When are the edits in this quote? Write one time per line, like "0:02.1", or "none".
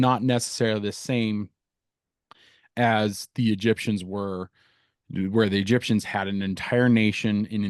none